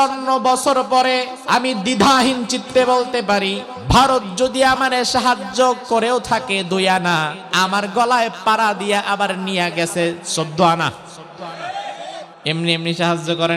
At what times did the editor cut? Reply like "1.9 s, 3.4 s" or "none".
1.3 s, 3.7 s, 7.4 s, 12.3 s